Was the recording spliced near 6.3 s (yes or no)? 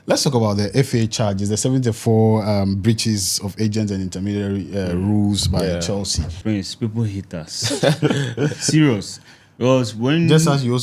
yes